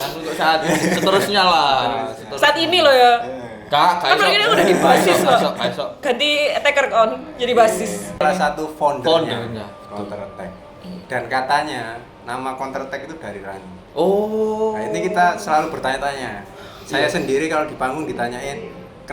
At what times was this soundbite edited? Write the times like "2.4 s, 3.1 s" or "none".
8.2 s